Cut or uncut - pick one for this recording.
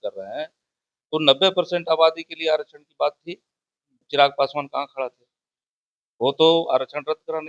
cut